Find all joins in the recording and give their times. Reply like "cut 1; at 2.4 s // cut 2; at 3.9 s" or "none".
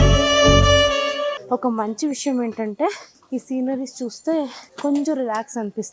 cut 1; at 3.1 s // cut 2; at 4.6 s